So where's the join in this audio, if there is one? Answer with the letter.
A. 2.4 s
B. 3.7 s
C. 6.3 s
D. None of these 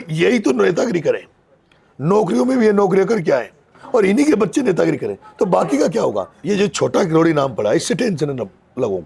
C